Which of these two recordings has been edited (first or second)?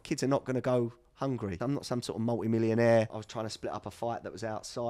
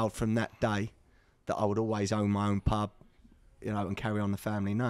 first